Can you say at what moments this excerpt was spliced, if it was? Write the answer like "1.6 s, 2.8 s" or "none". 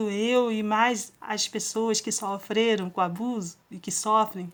none